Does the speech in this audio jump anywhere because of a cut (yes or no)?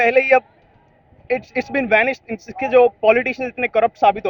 no